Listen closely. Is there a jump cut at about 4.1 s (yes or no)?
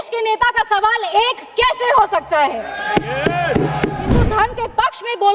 yes